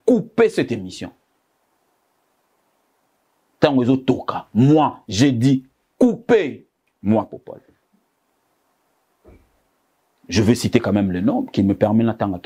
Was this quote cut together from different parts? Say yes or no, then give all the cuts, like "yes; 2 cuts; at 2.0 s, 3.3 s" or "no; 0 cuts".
no; 0 cuts